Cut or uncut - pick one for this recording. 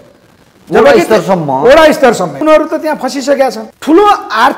cut